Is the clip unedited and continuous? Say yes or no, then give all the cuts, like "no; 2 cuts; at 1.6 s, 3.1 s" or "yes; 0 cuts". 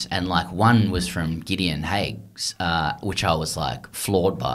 yes; 0 cuts